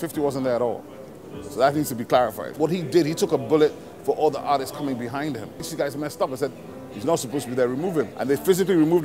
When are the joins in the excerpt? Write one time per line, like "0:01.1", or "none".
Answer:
0:02.4
0:05.7
0:08.1